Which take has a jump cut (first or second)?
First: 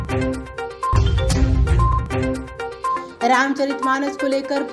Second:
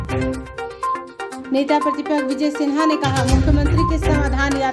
second